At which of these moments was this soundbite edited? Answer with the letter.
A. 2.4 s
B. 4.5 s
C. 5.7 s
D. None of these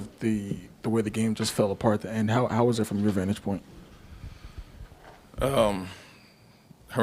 D